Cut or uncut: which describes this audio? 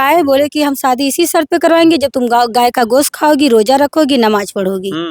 uncut